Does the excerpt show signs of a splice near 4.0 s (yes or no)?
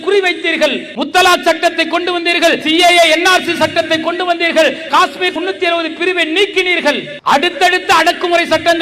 no